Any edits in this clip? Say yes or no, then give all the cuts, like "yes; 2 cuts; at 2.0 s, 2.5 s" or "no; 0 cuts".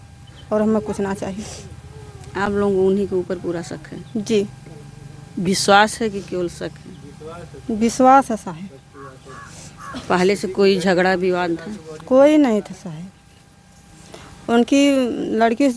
no; 0 cuts